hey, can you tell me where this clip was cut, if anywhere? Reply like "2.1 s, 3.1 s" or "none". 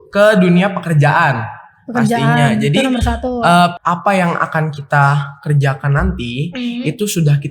3.8 s